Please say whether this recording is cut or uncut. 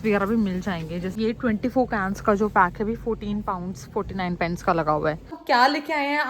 cut